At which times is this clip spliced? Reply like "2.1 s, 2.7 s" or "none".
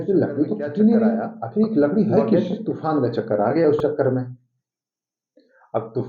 2.4 s